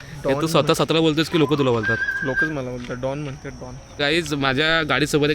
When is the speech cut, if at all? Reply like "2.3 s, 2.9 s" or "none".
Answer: 4.0 s